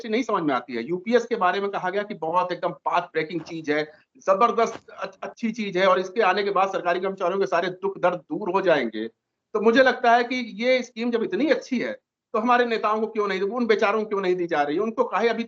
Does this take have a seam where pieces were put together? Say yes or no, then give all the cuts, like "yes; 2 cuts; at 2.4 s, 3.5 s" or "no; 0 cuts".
no; 0 cuts